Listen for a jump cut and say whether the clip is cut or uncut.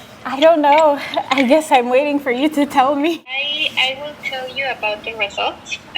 cut